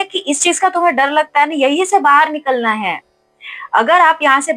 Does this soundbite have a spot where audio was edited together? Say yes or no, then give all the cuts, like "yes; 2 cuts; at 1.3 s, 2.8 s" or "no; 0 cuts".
no; 0 cuts